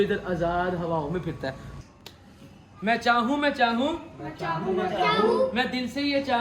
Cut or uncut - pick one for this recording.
cut